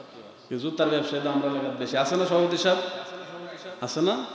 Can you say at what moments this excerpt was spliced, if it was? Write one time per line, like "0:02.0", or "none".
none